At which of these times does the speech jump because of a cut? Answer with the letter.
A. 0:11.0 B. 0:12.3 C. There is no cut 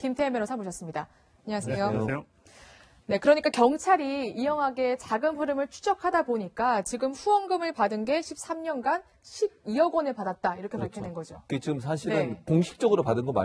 C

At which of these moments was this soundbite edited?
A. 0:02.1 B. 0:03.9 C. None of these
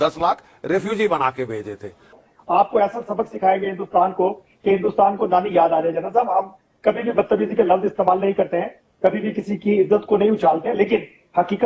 A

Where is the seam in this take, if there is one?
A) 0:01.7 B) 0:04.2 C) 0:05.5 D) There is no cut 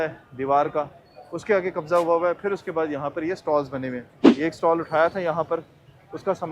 B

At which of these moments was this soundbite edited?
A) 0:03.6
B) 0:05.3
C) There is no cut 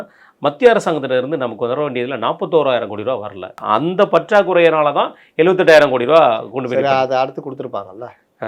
A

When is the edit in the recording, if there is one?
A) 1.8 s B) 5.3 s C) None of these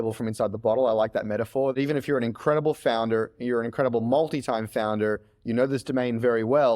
A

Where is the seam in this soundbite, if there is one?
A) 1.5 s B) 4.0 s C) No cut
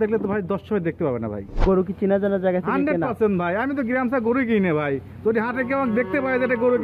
A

